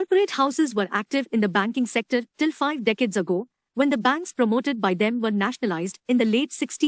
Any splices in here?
yes; 1 cut; at 1.9 s

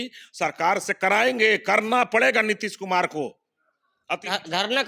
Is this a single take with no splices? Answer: yes; 0 cuts

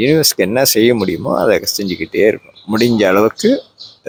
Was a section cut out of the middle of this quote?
no; 0 cuts

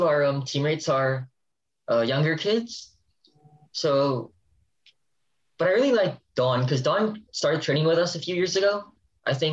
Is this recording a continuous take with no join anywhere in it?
yes; 0 cuts

